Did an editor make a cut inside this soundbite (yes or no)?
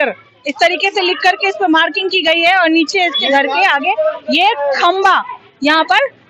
no